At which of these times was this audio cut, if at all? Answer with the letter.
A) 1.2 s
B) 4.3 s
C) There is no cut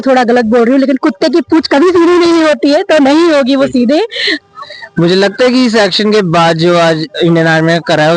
B